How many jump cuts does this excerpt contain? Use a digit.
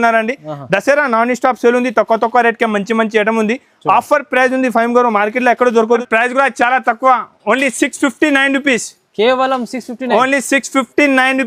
0